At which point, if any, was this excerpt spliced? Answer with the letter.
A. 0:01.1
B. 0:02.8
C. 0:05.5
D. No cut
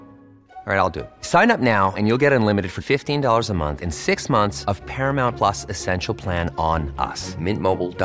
D